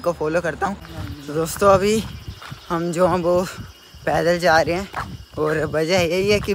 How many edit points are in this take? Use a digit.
1